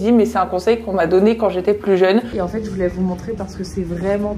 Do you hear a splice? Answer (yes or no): yes